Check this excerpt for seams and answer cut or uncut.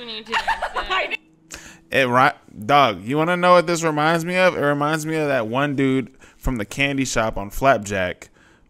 cut